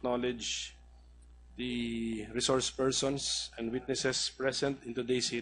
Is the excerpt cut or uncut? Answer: cut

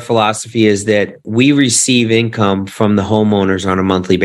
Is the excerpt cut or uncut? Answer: cut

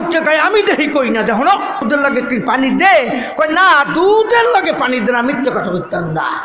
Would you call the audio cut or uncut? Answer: cut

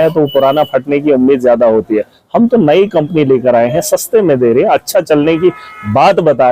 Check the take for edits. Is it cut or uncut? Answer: uncut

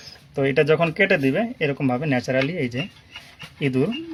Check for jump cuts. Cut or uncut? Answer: uncut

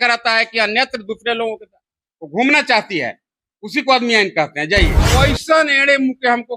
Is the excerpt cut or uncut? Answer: cut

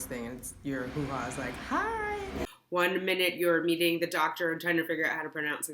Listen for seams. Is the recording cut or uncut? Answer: cut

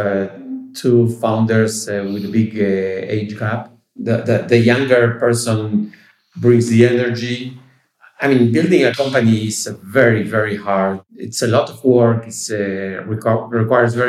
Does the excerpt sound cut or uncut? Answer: cut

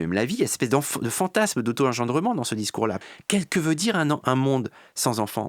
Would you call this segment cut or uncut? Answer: cut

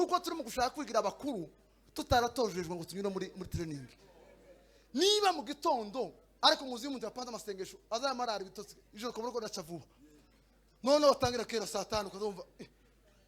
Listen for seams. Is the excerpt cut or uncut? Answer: uncut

